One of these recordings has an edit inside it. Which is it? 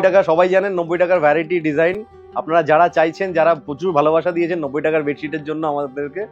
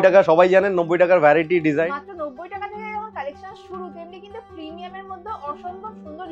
second; 1 cut; at 1.9 s

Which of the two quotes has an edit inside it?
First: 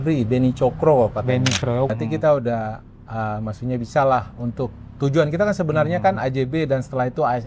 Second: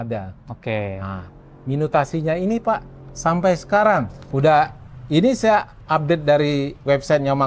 first; 1 cut; at 1.9 s

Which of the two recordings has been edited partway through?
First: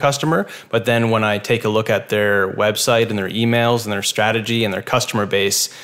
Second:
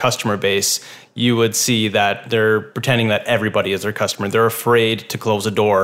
second; 1 cut; at 2.2 s

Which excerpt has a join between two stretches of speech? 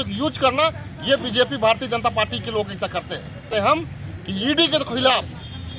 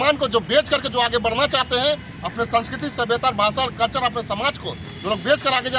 first; 1 cut; at 3.5 s

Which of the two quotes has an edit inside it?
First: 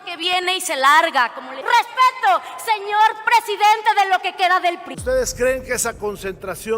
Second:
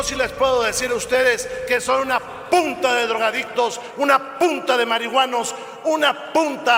first; 2 cuts; at 1.6 s, 4.9 s

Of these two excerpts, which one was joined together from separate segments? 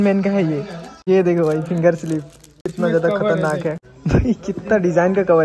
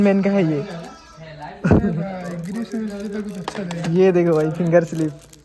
first; 2 cuts; at 0.9 s, 3.9 s

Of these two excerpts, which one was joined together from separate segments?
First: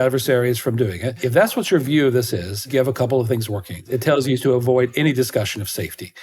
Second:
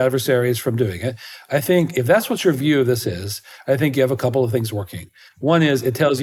first; 3 cuts; at 1.2 s, 2.7 s, 3.9 s

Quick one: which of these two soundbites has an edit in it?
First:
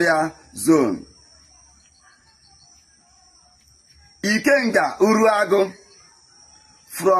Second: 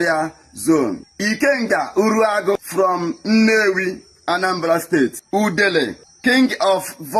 second; 4 cuts; at 1.1 s, 2.5 s, 5.2 s, 6.0 s

